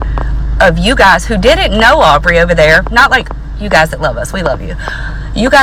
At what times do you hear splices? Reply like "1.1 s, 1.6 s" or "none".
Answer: none